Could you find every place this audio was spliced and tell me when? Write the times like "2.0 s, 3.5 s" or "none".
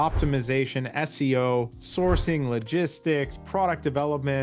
1.8 s